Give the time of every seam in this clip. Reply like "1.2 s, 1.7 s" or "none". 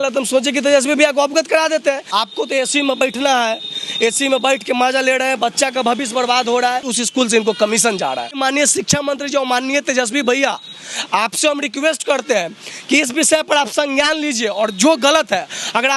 2.0 s, 6.9 s, 8.4 s